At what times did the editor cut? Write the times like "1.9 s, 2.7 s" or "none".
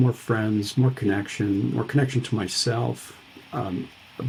none